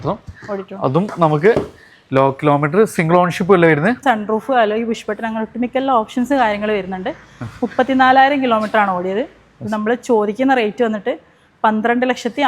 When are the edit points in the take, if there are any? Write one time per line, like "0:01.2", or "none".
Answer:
0:04.0